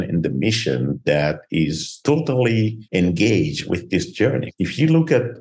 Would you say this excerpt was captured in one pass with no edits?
no; 3 cuts; at 1.9 s, 2.8 s, 4.0 s

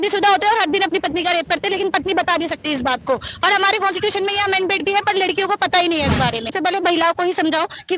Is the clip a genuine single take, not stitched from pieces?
no; 1 cut; at 6.5 s

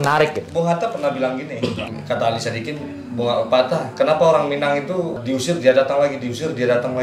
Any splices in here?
yes; 2 cuts; at 1.9 s, 5.2 s

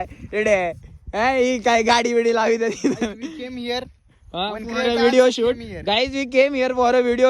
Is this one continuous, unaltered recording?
yes; 0 cuts

